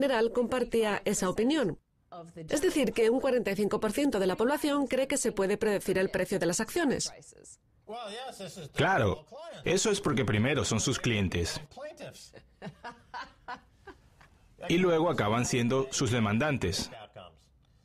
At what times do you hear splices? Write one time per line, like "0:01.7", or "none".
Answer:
0:02.1